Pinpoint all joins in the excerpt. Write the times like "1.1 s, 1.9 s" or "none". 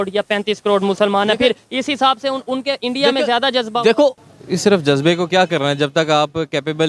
4.2 s

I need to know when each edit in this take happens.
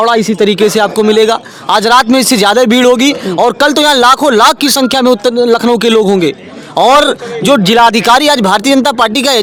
none

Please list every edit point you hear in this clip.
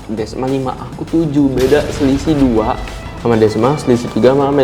none

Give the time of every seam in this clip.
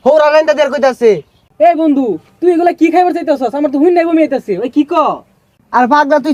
none

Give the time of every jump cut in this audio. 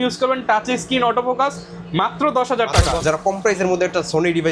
3.0 s

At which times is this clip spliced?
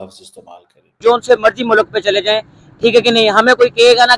1.0 s

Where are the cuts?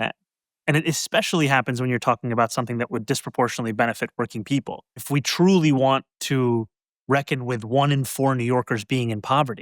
5.0 s

